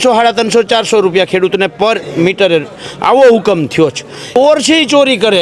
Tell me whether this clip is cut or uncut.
cut